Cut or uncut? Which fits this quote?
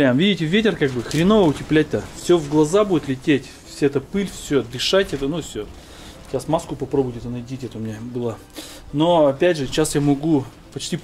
uncut